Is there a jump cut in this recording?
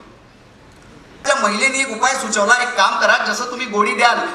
yes; 1 cut; at 1.2 s

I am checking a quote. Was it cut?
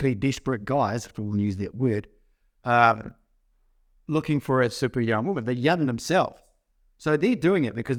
no; 0 cuts

